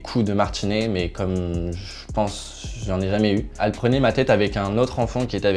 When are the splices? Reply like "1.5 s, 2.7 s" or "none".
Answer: 3.6 s